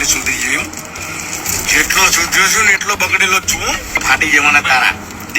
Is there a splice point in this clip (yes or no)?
yes